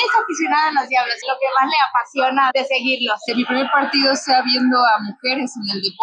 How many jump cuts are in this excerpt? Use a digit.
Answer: 1